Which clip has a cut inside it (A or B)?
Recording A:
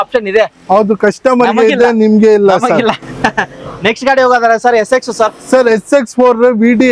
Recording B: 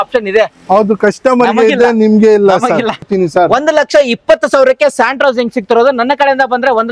B